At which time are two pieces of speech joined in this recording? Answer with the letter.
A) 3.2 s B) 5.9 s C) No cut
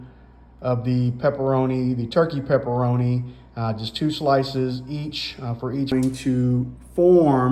B